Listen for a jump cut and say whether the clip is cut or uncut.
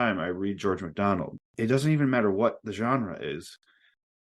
cut